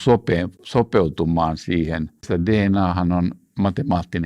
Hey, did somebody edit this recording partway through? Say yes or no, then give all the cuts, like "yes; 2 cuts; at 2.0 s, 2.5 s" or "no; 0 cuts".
yes; 1 cut; at 2.2 s